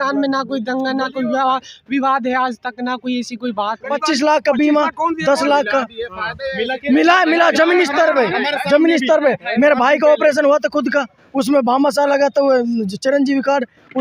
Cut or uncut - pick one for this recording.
cut